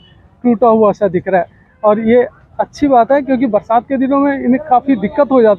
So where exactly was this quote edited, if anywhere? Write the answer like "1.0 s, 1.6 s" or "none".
none